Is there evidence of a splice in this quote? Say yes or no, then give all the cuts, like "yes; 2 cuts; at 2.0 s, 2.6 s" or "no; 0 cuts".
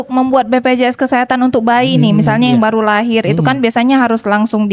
no; 0 cuts